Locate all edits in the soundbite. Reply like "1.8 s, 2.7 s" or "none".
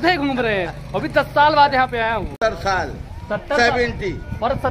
2.3 s